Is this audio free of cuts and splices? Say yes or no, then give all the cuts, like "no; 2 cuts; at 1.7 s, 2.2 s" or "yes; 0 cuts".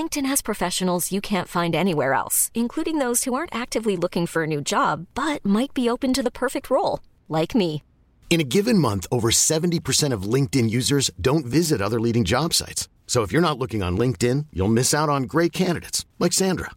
yes; 0 cuts